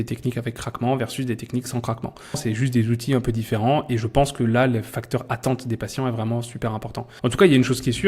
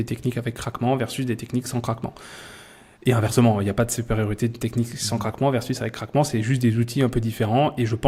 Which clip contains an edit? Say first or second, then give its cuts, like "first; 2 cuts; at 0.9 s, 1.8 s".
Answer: first; 2 cuts; at 2.4 s, 7.1 s